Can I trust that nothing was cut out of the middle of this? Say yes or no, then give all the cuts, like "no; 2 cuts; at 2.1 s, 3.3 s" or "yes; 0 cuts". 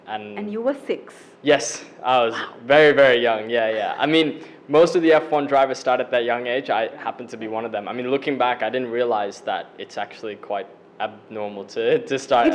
yes; 0 cuts